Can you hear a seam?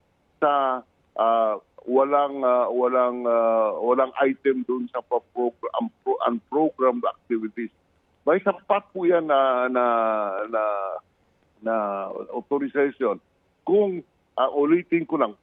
no; 0 cuts

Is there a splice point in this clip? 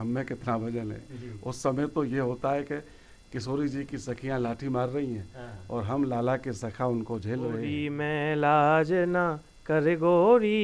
yes; 1 cut; at 7.9 s

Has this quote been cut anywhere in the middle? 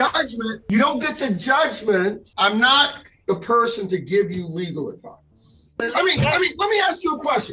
yes; 2 cuts; at 2.3 s, 5.8 s

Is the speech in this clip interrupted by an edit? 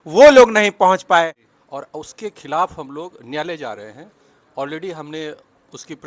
yes; 1 cut; at 1.4 s

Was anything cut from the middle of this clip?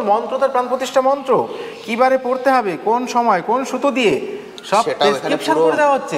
no; 0 cuts

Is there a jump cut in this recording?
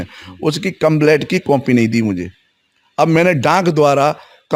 no; 0 cuts

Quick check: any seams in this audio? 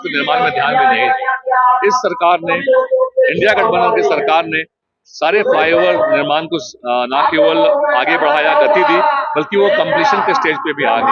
no; 0 cuts

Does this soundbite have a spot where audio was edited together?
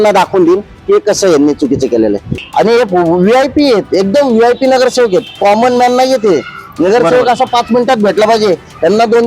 yes; 1 cut; at 2.3 s

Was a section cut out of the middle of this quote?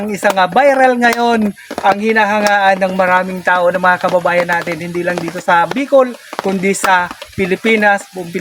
no; 0 cuts

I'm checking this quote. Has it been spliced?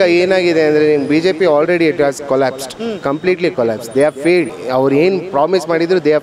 yes; 1 cut; at 4.6 s

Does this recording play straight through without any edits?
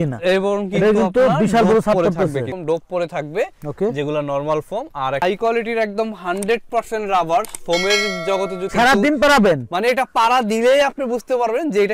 no; 3 cuts; at 2.5 s, 5.2 s, 8.7 s

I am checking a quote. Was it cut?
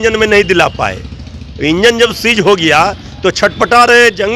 no; 0 cuts

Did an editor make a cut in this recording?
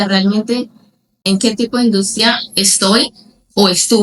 yes; 1 cut; at 1.2 s

